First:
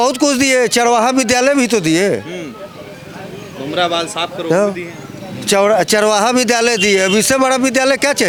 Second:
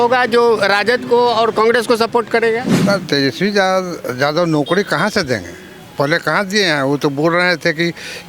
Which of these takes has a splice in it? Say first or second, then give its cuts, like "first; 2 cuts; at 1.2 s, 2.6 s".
second; 1 cut; at 2.7 s